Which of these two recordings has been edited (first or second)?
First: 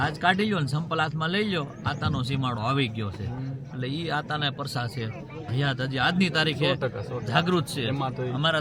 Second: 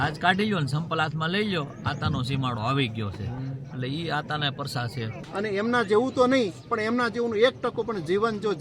second